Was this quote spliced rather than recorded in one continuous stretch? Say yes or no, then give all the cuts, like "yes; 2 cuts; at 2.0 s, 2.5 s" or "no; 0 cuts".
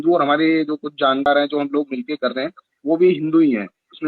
yes; 1 cut; at 1.3 s